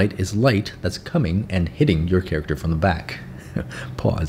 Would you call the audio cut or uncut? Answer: uncut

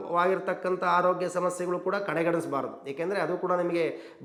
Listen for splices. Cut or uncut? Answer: uncut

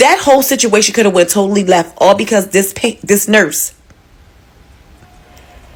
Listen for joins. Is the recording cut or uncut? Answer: uncut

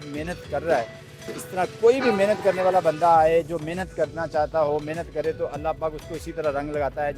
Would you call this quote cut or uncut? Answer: uncut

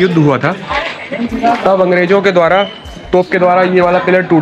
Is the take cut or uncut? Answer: uncut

